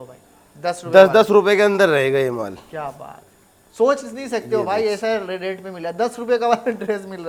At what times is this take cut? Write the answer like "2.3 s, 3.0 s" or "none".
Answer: none